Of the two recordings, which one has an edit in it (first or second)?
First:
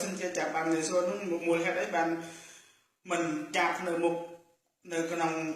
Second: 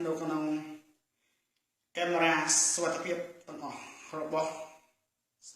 second